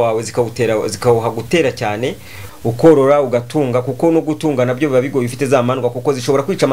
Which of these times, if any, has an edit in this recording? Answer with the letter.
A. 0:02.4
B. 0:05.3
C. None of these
A